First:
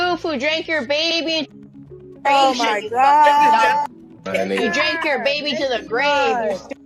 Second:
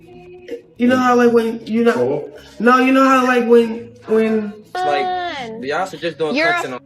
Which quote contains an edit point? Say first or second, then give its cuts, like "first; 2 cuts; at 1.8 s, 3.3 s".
second; 1 cut; at 4.5 s